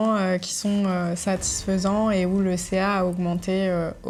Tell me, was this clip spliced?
no; 0 cuts

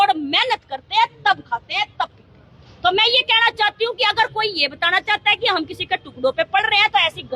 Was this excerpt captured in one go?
yes; 0 cuts

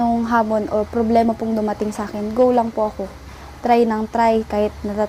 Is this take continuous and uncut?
yes; 0 cuts

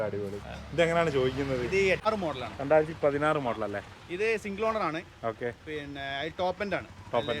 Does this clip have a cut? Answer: yes; 1 cut; at 2.1 s

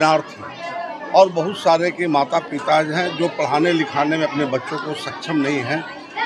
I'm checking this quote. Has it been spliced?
no; 0 cuts

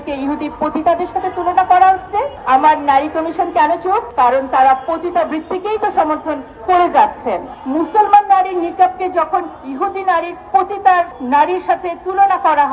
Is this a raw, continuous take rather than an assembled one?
no; 1 cut; at 7.5 s

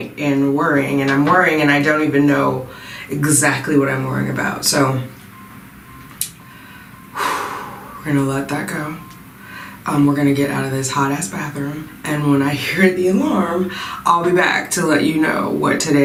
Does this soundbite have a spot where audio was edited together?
no; 0 cuts

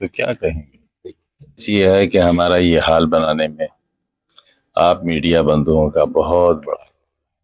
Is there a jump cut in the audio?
yes; 1 cut; at 1.7 s

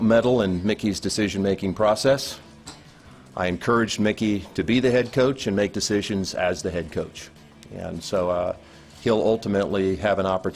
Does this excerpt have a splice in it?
no; 0 cuts

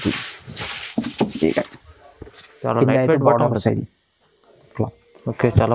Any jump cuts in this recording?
yes; 1 cut; at 4.7 s

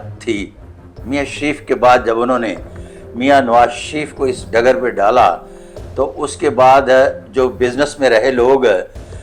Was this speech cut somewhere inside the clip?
no; 0 cuts

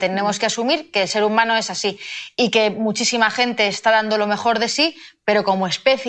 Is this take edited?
no; 0 cuts

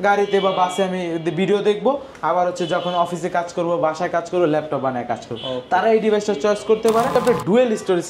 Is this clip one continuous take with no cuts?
no; 1 cut; at 7.1 s

